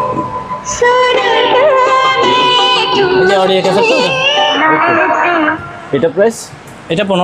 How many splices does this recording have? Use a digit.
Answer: 1